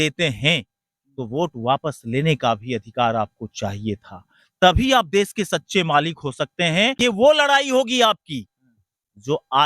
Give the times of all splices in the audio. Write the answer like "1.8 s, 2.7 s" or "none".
6.9 s